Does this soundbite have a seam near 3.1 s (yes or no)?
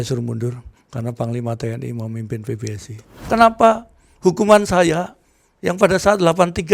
yes